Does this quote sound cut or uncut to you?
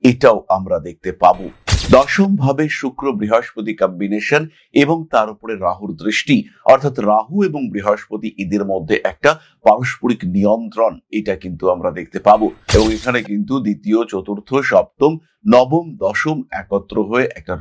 cut